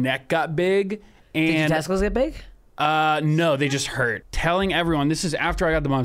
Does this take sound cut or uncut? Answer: cut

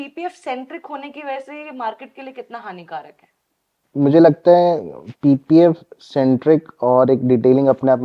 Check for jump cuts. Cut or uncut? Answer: uncut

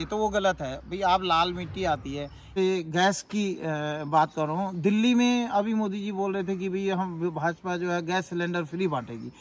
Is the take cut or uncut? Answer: cut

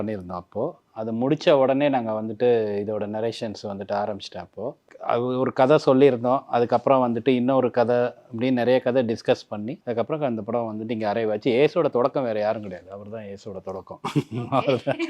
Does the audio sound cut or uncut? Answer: cut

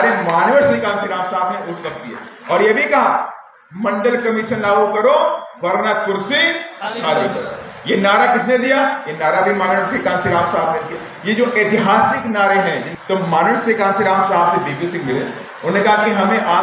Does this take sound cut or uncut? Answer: cut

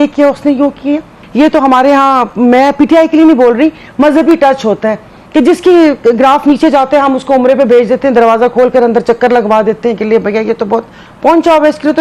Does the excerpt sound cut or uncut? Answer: cut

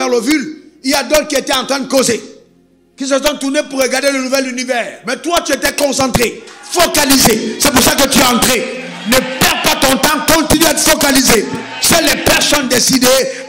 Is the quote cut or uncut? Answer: uncut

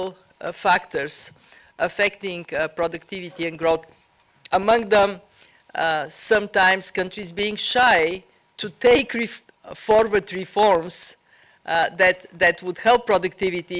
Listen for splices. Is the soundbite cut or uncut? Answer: uncut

